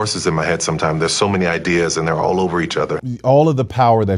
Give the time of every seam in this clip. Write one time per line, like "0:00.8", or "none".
0:03.0